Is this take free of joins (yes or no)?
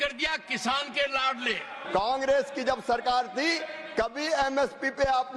no